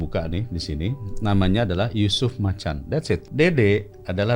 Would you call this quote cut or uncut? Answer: cut